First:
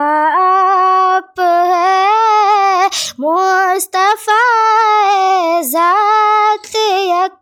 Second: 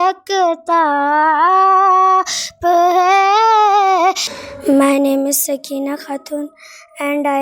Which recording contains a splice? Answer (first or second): second